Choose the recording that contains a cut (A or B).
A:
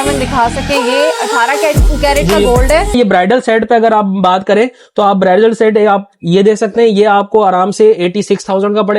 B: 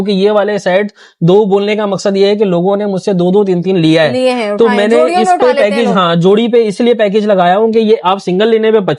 A